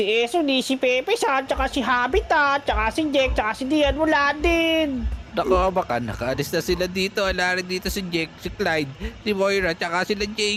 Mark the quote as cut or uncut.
uncut